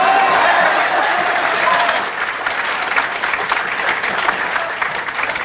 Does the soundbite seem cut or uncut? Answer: uncut